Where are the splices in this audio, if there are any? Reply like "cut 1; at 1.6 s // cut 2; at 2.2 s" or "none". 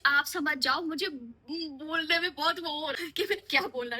cut 1; at 3.0 s